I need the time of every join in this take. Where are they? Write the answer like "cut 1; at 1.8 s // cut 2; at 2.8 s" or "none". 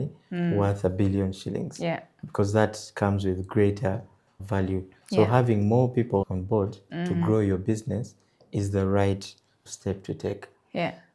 none